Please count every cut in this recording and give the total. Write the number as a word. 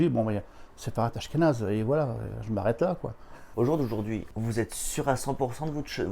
two